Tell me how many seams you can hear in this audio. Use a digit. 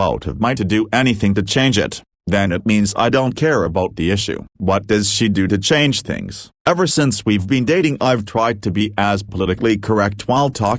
0